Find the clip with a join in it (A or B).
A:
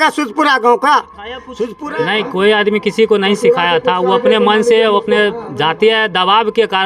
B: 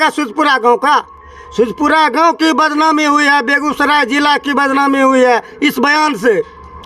A